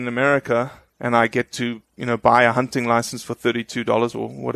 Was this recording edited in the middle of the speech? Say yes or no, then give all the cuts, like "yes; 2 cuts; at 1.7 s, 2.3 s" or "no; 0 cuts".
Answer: no; 0 cuts